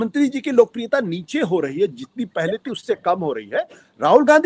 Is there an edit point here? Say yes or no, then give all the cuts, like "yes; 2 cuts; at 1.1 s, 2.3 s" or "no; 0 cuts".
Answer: no; 0 cuts